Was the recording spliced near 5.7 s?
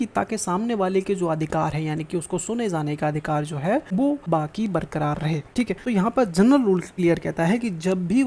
yes; 3 cuts; at 4.1 s, 5.7 s, 6.9 s

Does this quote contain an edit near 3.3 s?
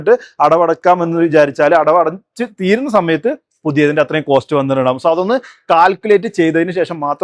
no; 0 cuts

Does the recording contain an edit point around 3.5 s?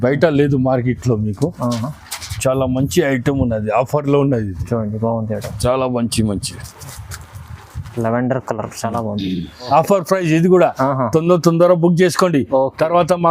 no; 1 cut; at 9.6 s

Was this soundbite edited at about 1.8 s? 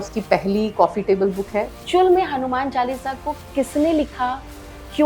yes; 1 cut; at 1.8 s

